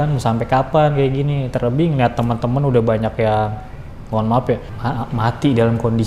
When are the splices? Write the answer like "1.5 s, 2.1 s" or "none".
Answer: 4.7 s